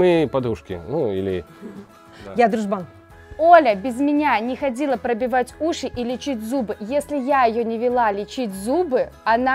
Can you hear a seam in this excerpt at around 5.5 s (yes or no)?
no